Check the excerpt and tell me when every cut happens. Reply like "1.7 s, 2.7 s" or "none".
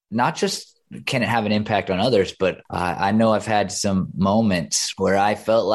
2.6 s, 4.8 s